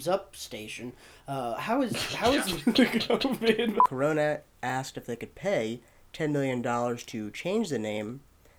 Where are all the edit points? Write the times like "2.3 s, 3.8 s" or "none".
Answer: 3.9 s